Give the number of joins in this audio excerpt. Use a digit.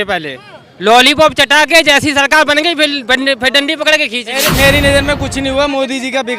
1